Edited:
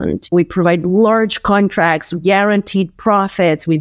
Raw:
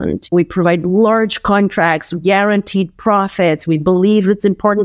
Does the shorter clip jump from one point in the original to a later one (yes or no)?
no